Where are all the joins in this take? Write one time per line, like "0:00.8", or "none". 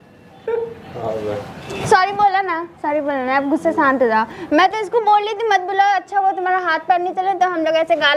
0:01.6